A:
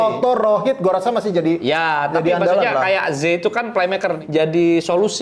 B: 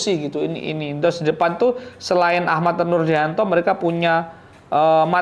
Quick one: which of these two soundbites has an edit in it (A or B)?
A